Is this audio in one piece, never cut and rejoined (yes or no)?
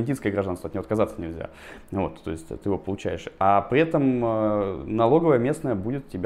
yes